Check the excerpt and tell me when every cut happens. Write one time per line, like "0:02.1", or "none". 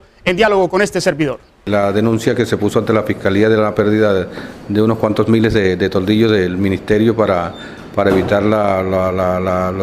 0:07.5